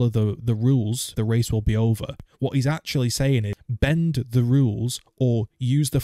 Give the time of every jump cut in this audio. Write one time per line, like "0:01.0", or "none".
0:01.1
0:02.2
0:03.6